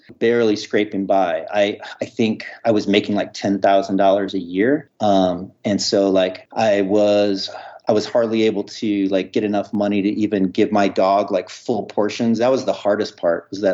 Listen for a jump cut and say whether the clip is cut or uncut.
cut